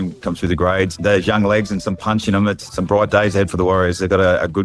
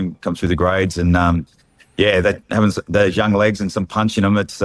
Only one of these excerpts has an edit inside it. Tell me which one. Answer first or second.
first